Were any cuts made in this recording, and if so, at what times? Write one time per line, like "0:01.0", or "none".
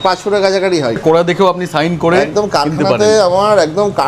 0:01.0